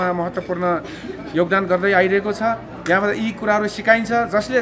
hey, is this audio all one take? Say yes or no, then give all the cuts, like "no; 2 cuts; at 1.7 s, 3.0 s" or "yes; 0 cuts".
yes; 0 cuts